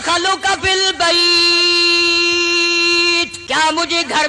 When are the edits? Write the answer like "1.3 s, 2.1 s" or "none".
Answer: 3.4 s